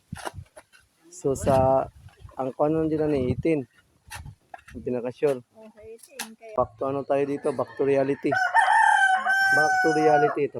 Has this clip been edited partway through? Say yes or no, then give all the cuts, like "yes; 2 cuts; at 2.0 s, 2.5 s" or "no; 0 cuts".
yes; 1 cut; at 6.6 s